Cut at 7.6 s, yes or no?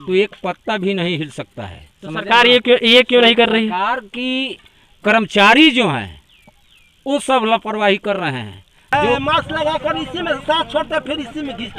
no